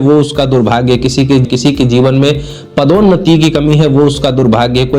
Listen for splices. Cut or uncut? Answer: cut